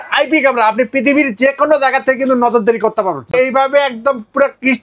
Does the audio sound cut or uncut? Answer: cut